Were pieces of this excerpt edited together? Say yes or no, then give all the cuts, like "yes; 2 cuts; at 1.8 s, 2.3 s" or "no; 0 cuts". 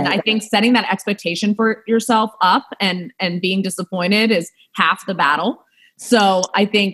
no; 0 cuts